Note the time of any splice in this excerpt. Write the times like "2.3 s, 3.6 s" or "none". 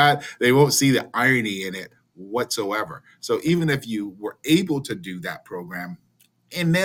none